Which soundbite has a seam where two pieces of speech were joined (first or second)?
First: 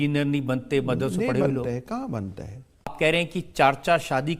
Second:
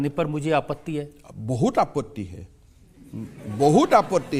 first